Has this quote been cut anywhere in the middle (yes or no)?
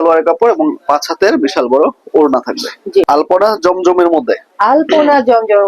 yes